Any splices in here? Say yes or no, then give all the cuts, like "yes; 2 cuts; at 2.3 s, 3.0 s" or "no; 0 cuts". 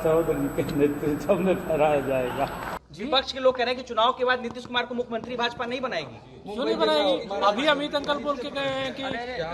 yes; 1 cut; at 2.7 s